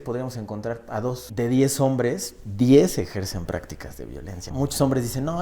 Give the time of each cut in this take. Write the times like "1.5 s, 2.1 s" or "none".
1.3 s, 4.4 s